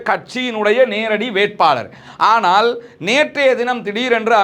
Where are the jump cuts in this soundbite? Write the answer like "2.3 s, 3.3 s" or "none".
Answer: none